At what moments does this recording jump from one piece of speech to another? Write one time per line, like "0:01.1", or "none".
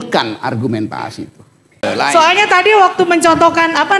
0:01.8